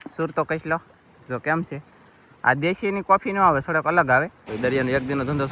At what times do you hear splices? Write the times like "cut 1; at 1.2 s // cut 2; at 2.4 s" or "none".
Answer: cut 1; at 4.4 s